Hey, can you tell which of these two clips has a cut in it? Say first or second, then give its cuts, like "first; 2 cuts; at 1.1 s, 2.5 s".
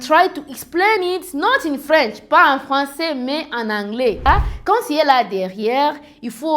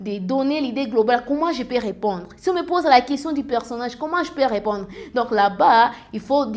first; 1 cut; at 4.3 s